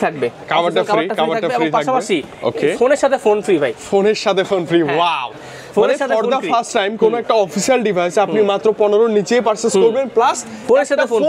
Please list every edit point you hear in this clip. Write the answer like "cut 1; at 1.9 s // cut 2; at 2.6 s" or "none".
none